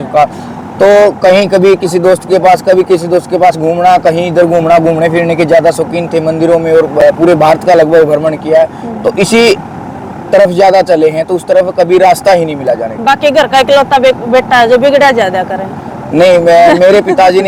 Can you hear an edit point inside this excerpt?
no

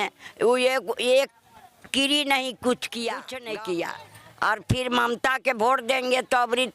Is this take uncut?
no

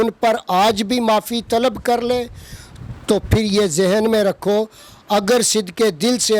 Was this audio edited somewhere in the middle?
no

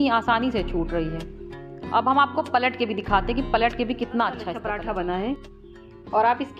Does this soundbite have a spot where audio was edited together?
yes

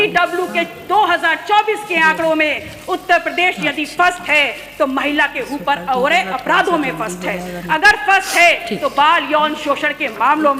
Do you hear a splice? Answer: no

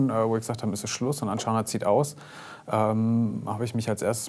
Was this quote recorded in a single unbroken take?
yes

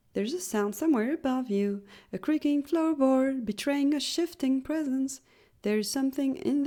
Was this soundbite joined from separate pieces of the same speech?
no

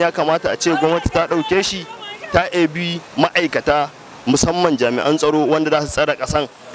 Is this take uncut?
yes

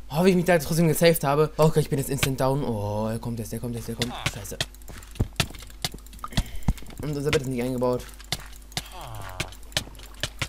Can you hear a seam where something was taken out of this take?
yes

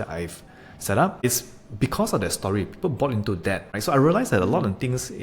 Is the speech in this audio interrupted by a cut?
yes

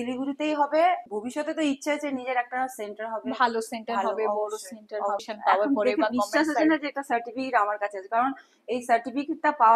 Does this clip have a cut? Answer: yes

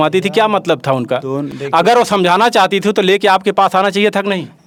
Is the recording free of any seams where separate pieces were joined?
yes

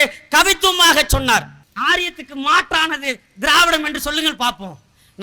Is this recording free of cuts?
no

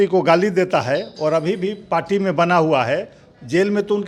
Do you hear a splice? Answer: no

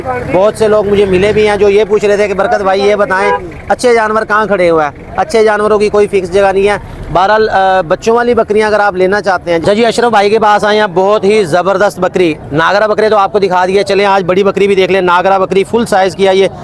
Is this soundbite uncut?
no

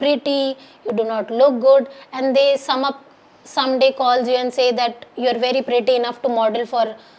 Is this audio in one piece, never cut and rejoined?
yes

